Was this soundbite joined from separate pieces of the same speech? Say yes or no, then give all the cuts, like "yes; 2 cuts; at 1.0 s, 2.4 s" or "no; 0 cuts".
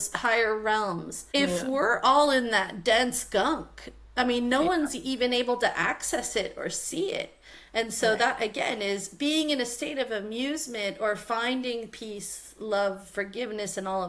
no; 0 cuts